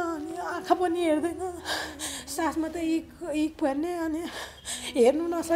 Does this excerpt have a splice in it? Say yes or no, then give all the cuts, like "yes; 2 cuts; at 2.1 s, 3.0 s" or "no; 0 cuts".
no; 0 cuts